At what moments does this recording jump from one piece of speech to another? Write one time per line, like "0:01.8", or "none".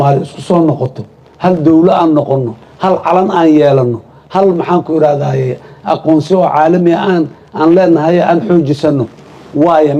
none